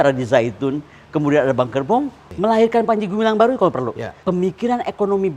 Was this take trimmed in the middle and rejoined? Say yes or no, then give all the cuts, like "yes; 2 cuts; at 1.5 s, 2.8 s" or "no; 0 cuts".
yes; 2 cuts; at 2.2 s, 4.2 s